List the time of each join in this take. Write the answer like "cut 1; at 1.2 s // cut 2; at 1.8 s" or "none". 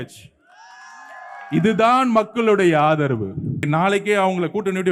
cut 1; at 3.6 s